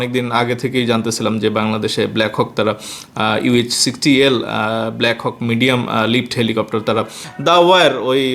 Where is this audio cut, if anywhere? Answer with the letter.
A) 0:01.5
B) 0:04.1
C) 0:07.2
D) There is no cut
C